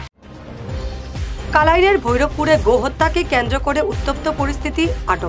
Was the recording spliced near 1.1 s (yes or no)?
yes